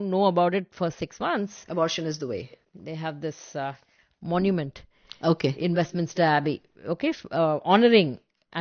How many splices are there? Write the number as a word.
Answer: one